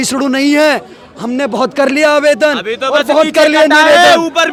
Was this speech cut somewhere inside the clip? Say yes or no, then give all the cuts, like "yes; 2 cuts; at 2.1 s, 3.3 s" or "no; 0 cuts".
no; 0 cuts